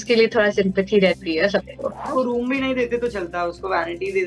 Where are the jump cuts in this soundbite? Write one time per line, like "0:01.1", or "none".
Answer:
0:02.1